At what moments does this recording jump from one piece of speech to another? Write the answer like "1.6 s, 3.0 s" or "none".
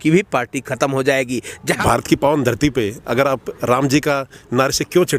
1.8 s